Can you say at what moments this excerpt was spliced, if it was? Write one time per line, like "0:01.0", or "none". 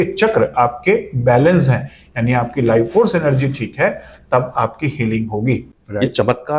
0:05.7